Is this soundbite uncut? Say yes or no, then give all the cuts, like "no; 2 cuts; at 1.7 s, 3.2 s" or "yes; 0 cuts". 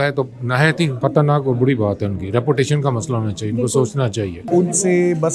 no; 2 cuts; at 0.9 s, 4.4 s